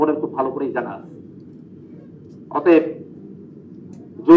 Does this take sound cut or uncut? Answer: uncut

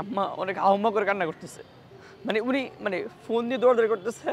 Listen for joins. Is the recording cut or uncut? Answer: uncut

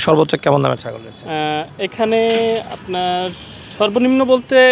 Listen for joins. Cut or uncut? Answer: uncut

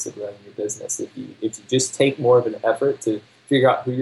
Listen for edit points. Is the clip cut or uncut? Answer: uncut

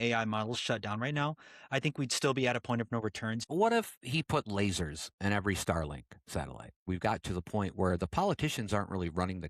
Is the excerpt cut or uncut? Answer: cut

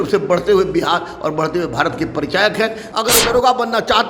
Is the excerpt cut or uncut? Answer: cut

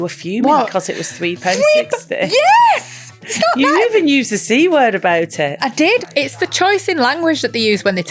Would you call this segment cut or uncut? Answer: cut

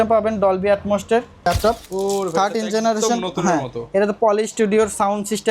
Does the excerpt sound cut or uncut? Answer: cut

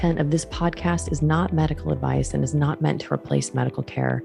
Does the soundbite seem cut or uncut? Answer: uncut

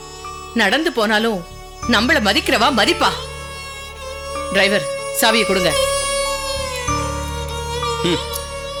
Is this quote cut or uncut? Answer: uncut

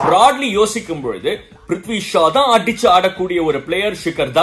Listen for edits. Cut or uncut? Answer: uncut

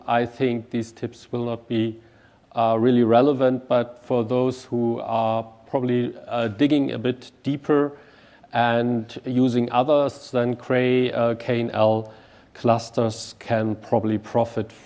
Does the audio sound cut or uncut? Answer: cut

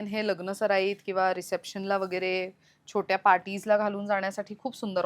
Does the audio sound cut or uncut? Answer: uncut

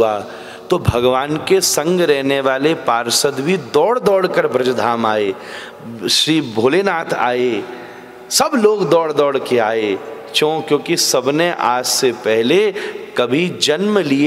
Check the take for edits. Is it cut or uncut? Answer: uncut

